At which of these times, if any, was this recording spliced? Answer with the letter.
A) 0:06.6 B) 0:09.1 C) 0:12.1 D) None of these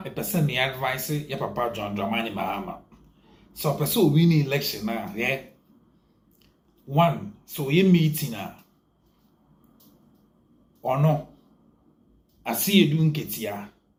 D